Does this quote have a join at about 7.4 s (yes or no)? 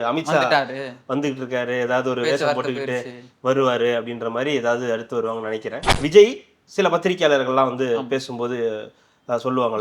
no